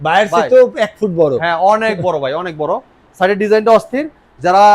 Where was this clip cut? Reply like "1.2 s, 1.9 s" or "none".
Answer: none

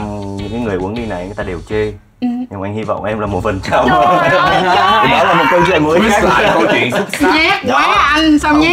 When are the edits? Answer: none

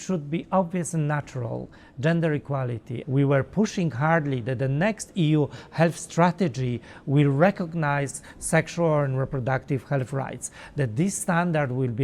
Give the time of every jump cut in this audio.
2.9 s

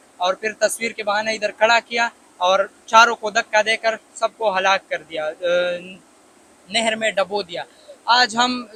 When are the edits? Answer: none

